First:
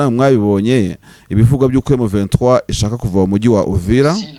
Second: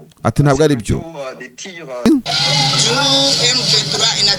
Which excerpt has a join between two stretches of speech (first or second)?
second